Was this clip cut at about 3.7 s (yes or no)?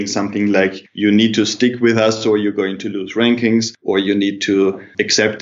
yes